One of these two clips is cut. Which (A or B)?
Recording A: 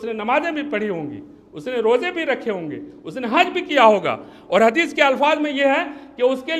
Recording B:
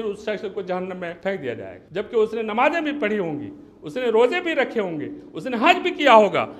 B